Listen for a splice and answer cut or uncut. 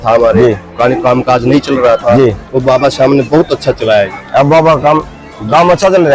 uncut